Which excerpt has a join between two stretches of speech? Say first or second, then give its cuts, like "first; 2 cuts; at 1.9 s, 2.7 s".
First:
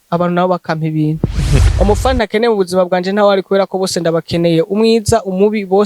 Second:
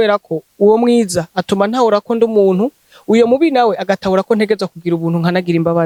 first; 1 cut; at 1.6 s